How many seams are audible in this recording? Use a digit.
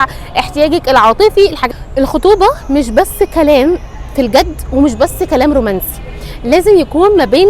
1